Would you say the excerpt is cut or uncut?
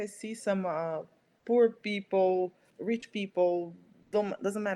cut